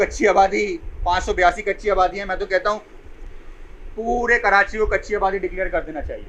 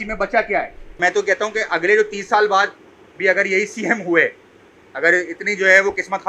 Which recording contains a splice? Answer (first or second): second